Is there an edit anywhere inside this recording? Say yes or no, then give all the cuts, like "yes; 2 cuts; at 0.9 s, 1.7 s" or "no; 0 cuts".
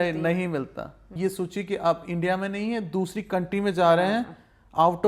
yes; 1 cut; at 1.1 s